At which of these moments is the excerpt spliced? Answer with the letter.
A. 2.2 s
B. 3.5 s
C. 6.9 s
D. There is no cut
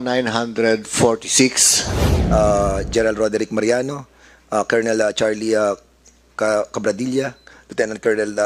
A